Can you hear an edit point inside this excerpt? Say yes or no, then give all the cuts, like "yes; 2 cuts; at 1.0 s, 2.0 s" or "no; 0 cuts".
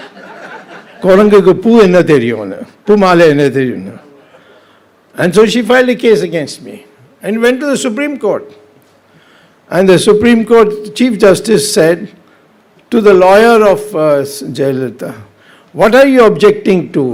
no; 0 cuts